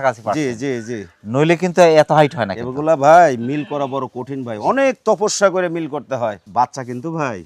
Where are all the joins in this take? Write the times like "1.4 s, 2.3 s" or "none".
6.4 s